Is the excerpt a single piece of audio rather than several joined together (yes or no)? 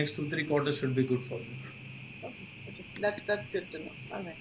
yes